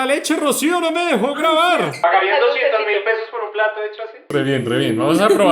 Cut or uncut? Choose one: cut